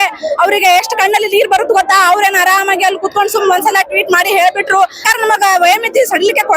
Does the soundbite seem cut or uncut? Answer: cut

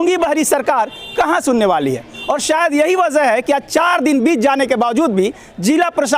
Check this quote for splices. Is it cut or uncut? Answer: uncut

